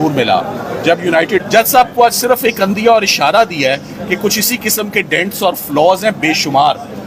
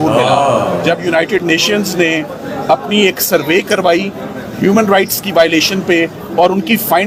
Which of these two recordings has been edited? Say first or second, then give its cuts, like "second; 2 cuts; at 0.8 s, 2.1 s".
first; 1 cut; at 1.5 s